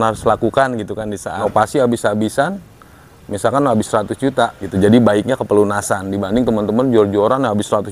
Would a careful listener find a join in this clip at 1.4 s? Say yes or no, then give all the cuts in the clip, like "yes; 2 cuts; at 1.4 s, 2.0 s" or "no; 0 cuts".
yes; 2 cuts; at 1.4 s, 4.6 s